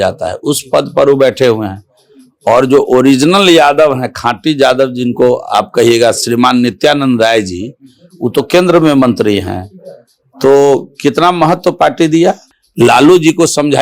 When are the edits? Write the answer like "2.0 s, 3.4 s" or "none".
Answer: 12.5 s